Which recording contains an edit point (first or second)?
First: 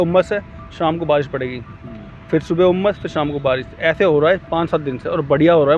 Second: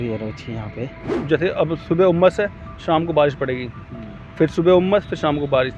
second